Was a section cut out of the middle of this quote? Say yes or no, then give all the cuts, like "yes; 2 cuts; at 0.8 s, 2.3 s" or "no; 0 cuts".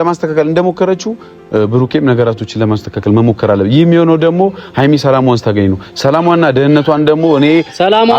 no; 0 cuts